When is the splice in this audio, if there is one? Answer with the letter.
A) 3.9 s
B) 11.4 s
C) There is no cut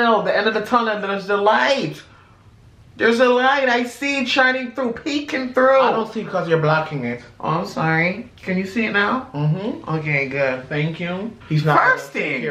B